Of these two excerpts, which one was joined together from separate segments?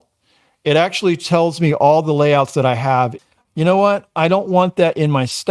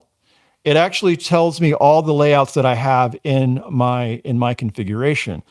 first; 1 cut; at 3.2 s

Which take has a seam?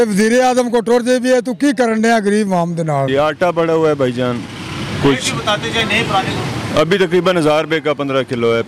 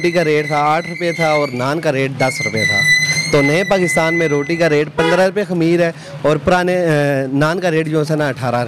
first; 1 cut; at 3.1 s

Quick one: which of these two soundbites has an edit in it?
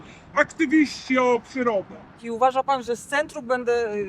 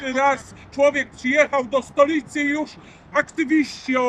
first; 1 cut; at 2.2 s

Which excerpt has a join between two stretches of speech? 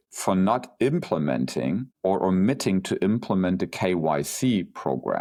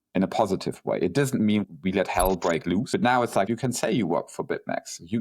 second; 2 cuts; at 1.7 s, 3.4 s

